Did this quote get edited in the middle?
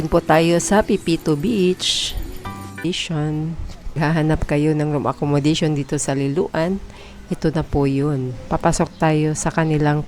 yes; 1 cut; at 2.8 s

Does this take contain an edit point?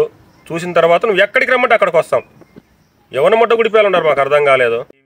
no; 0 cuts

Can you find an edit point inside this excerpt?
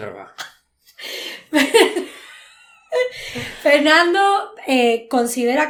no; 0 cuts

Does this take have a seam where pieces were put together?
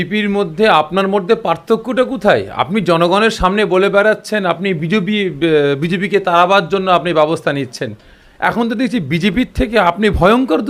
no; 0 cuts

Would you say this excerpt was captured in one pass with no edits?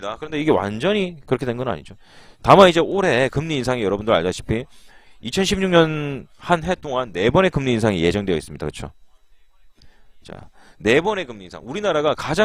yes; 0 cuts

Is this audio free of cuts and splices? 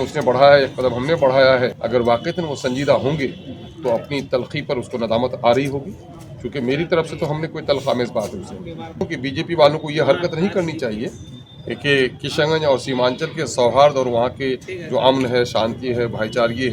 no; 2 cuts; at 1.8 s, 9.1 s

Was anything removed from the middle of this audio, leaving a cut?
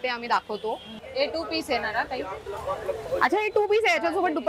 yes; 1 cut; at 0.9 s

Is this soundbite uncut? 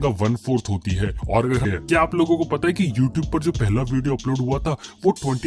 no; 1 cut; at 1.7 s

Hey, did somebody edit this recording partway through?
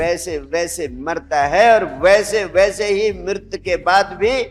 no; 0 cuts

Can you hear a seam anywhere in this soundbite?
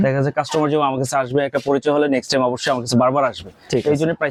no; 0 cuts

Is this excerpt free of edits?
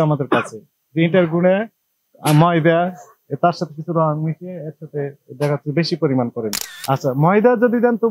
no; 1 cut; at 6.7 s

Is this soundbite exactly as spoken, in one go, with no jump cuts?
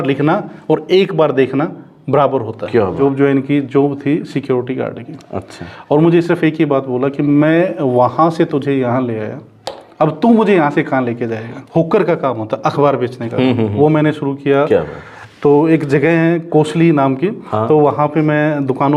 no; 2 cuts; at 2.9 s, 11.5 s

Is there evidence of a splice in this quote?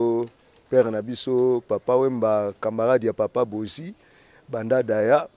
no; 0 cuts

